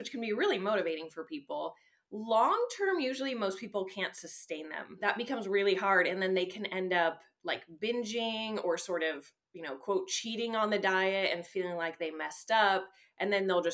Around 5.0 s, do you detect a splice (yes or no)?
yes